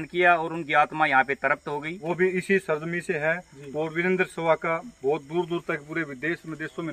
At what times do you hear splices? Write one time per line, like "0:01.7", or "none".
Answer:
0:01.9

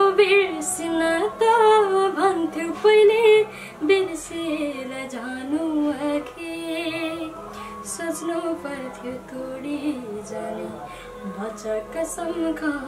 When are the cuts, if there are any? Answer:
none

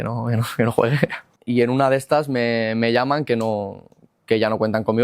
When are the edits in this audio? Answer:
0:01.3

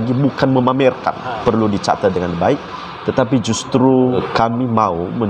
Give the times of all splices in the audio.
0:01.4
0:04.2

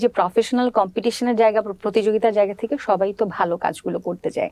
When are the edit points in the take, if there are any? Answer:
none

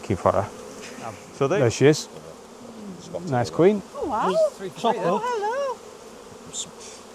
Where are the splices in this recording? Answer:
0:01.2

